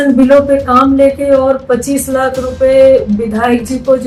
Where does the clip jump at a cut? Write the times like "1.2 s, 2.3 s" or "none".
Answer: none

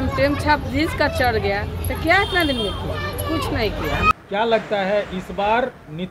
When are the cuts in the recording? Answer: 4.1 s

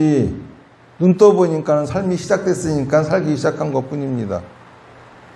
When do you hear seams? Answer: none

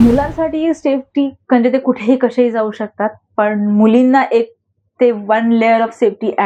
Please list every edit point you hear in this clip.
none

